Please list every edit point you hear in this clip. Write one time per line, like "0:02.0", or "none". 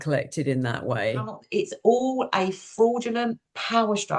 0:01.3